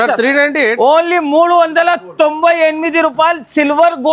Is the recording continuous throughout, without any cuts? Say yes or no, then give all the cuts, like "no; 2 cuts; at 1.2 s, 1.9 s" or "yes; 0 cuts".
yes; 0 cuts